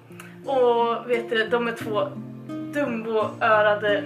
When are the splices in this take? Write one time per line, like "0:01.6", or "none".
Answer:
0:01.1